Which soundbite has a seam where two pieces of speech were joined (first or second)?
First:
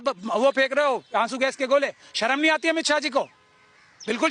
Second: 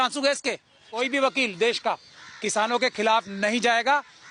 second